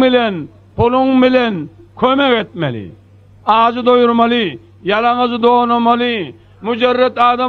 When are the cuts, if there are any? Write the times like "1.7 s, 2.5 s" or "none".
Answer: none